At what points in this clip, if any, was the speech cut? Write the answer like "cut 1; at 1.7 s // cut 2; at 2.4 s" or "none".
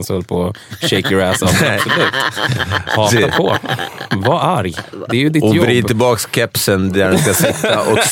none